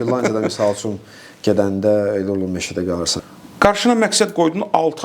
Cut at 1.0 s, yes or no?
no